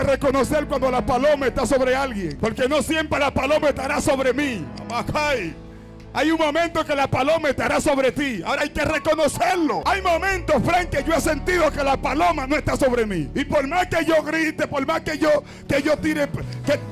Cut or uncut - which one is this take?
cut